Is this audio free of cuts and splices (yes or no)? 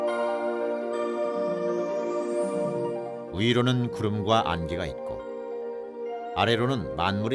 yes